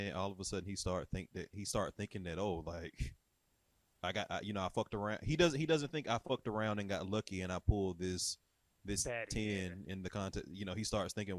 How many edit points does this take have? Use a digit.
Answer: 0